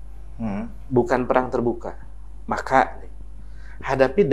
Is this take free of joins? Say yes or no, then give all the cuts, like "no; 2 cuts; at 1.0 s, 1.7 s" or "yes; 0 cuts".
yes; 0 cuts